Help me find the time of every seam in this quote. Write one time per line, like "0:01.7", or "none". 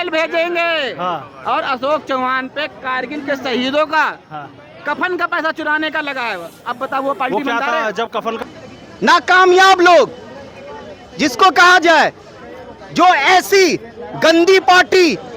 0:08.4